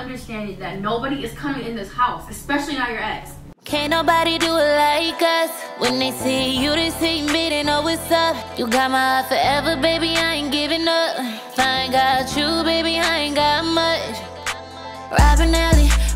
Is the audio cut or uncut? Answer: cut